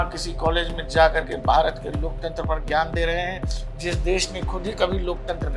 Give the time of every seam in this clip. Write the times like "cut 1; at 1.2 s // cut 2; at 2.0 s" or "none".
none